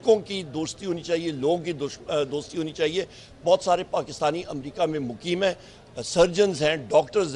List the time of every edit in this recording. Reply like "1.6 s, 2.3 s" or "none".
none

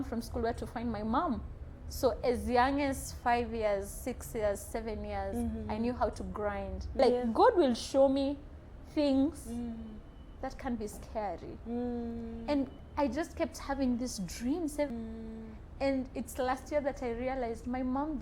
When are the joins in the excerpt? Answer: 6.9 s, 14.9 s

